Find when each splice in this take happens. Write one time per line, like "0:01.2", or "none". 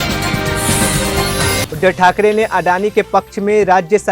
0:01.6